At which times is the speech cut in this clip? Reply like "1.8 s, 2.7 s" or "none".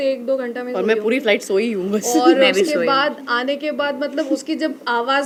none